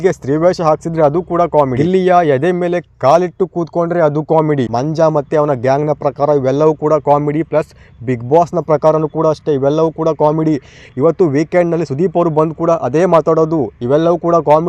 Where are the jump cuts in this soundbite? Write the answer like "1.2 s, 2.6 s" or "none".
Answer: 1.8 s, 4.7 s